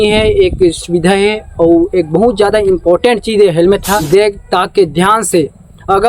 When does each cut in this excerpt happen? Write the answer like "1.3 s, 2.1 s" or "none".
4.0 s